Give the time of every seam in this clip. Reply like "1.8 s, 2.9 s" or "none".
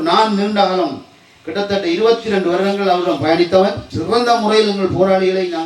3.9 s